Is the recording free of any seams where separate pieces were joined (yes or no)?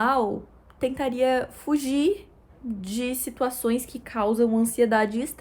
yes